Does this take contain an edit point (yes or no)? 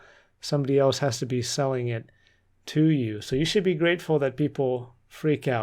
no